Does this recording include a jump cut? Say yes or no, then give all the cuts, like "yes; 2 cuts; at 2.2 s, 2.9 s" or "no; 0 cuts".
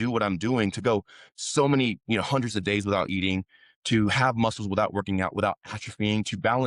no; 0 cuts